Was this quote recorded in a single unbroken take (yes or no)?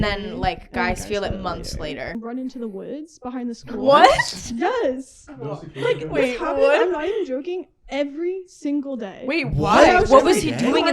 no